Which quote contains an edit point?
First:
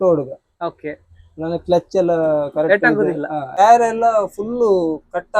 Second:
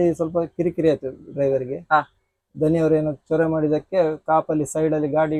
first; 1 cut; at 3.5 s

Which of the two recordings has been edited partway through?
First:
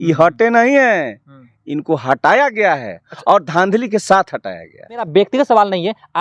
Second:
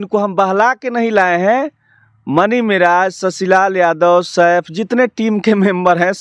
first; 1 cut; at 5.1 s

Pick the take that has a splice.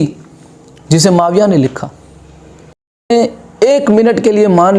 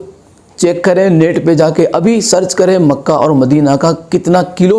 first; 1 cut; at 3.1 s

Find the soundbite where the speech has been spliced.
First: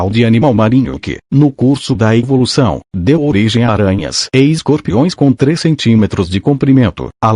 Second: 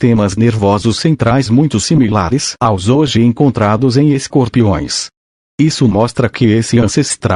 first; 2 cuts; at 3.8 s, 5.1 s

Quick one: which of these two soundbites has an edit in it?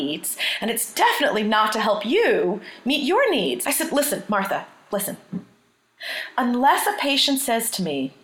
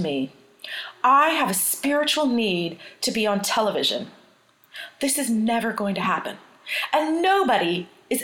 first; 1 cut; at 3.6 s

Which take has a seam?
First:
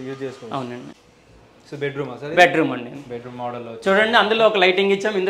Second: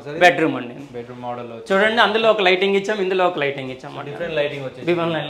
first; 1 cut; at 0.9 s

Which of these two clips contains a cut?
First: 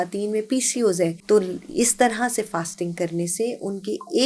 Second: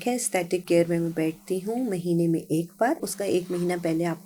first; 1 cut; at 1.2 s

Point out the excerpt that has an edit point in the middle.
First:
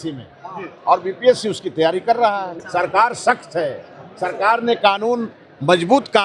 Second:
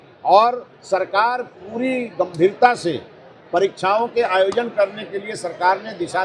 first; 1 cut; at 2.6 s

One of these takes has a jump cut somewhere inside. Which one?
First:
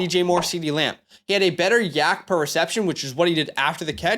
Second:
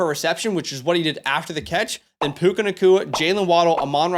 first; 1 cut; at 1.1 s

